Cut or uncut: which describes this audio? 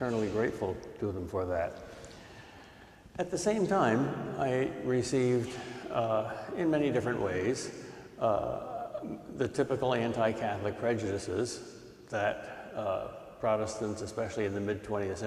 cut